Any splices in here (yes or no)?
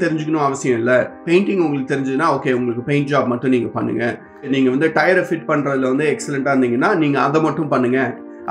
no